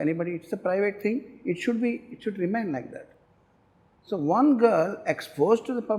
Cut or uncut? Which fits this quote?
uncut